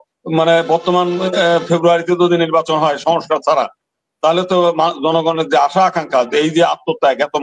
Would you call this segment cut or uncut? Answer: uncut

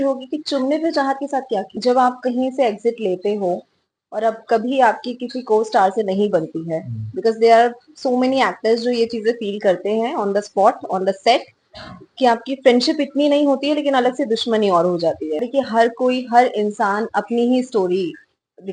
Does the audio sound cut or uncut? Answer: cut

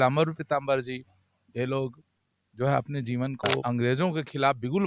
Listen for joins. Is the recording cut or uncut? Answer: cut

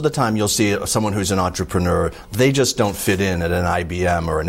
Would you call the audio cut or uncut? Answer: uncut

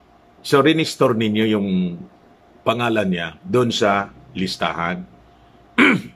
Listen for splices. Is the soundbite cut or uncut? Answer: uncut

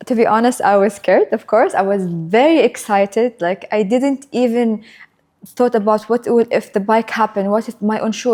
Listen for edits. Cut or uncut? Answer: uncut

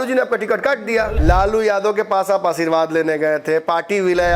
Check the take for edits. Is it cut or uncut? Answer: cut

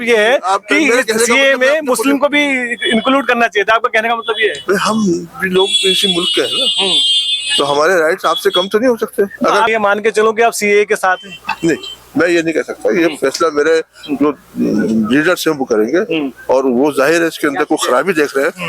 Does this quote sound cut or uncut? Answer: cut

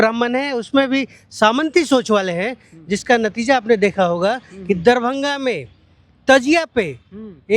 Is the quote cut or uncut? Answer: uncut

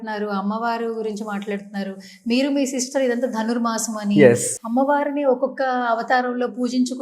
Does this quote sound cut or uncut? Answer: cut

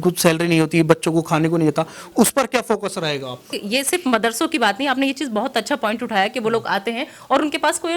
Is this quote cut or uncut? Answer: cut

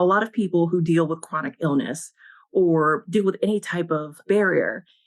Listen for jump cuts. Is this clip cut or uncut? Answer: uncut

